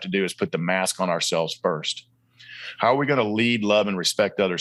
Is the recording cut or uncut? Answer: uncut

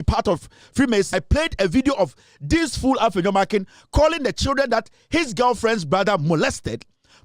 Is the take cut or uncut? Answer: cut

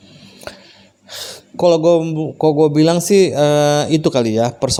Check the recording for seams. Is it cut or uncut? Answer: uncut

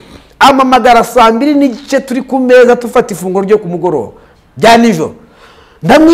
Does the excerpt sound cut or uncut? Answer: uncut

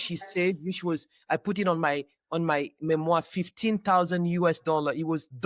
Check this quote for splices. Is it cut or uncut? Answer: uncut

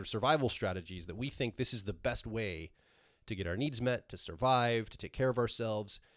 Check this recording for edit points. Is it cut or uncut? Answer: uncut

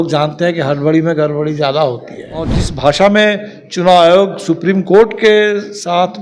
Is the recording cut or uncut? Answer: cut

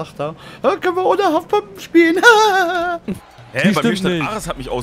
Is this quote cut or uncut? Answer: cut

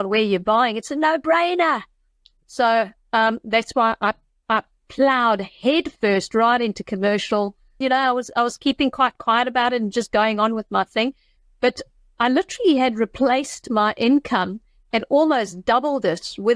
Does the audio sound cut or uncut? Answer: cut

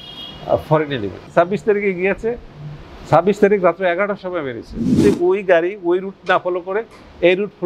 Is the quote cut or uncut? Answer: cut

